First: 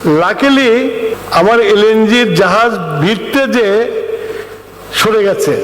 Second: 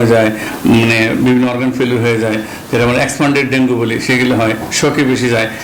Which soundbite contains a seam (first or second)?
first